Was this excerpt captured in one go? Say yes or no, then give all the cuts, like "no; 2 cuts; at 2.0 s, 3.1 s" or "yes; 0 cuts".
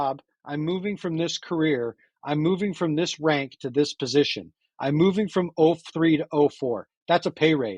yes; 0 cuts